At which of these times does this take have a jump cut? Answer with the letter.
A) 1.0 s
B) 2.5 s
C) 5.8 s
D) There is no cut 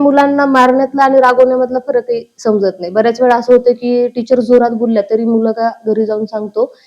D